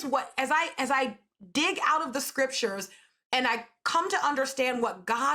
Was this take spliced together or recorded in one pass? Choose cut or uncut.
uncut